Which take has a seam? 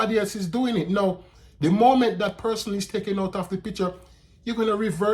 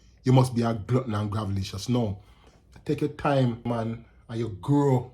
second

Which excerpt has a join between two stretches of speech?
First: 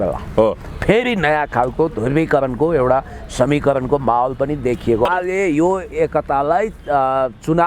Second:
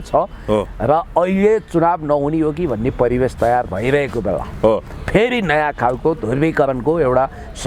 first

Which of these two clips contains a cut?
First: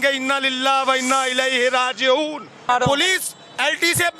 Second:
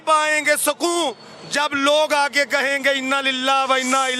first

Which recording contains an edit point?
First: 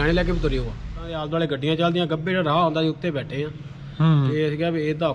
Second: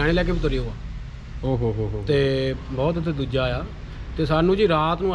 first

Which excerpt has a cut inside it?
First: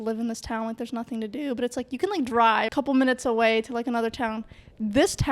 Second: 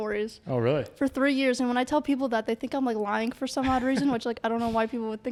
first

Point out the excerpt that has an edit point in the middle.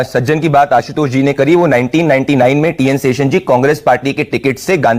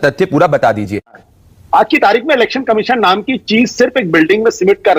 second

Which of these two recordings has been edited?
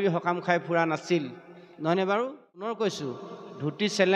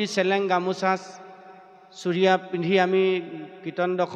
first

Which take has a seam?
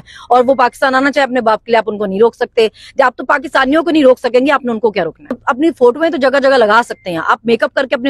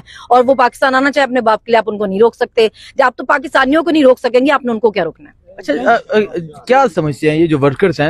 first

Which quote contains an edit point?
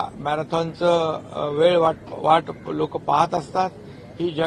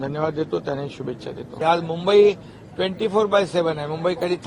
second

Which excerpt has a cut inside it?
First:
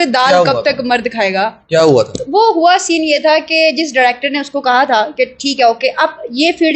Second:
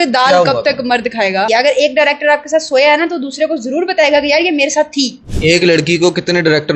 second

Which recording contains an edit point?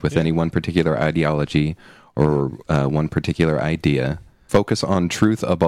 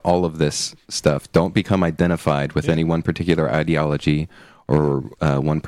first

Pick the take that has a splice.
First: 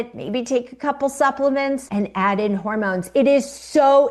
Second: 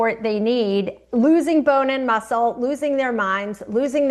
first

